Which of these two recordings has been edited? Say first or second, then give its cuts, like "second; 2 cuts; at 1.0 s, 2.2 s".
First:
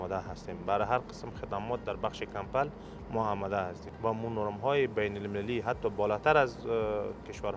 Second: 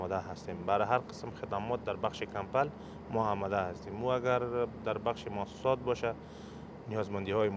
first; 1 cut; at 3.8 s